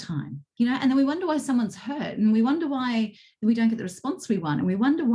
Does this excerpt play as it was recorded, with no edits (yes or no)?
yes